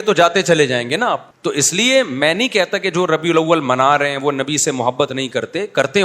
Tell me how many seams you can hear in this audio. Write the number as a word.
one